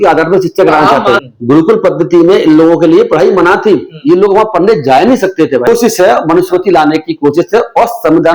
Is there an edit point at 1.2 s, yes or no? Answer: yes